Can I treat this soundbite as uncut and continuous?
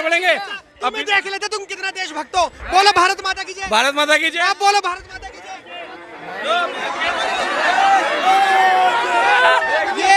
yes; 0 cuts

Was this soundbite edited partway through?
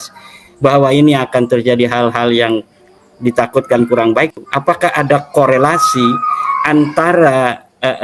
yes; 1 cut; at 4.4 s

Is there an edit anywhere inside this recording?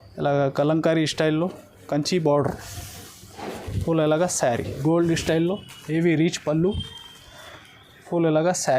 yes; 1 cut; at 4.8 s

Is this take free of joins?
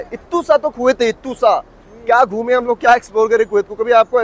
yes; 0 cuts

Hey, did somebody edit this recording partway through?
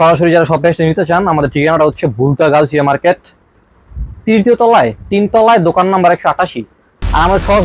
no; 0 cuts

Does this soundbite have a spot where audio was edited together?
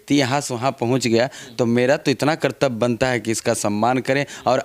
no; 0 cuts

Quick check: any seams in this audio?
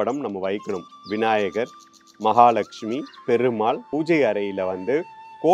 yes; 1 cut; at 3.9 s

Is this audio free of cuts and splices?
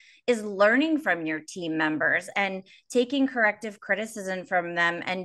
yes; 0 cuts

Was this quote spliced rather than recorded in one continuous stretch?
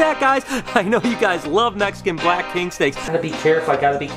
yes; 1 cut; at 3.0 s

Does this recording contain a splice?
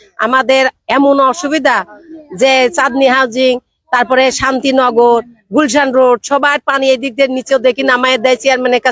no; 0 cuts

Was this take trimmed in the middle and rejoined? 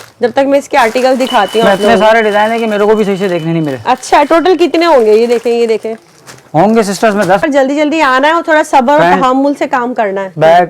yes; 1 cut; at 7.4 s

